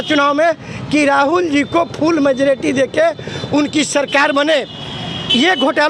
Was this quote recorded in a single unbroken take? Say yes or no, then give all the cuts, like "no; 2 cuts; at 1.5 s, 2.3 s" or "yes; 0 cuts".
yes; 0 cuts